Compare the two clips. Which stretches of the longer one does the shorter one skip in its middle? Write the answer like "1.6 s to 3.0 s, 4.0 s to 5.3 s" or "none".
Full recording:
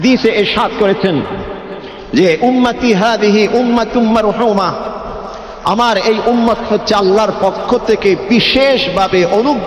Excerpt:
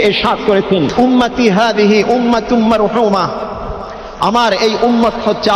1.3 s to 2.4 s